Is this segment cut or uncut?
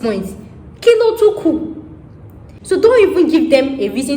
cut